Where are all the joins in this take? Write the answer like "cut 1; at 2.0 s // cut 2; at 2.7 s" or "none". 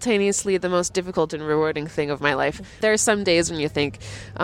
cut 1; at 2.8 s